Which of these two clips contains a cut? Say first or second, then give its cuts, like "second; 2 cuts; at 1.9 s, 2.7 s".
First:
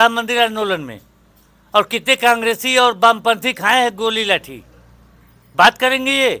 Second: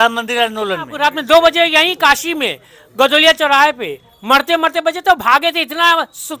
second; 1 cut; at 0.9 s